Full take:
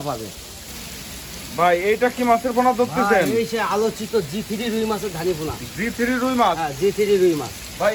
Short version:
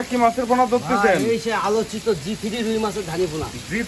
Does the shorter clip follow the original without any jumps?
yes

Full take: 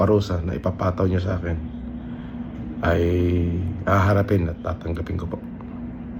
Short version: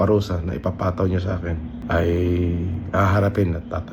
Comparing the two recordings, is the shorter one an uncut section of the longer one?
no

